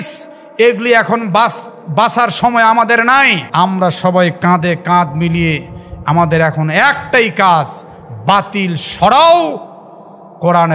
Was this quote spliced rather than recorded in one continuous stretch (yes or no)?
yes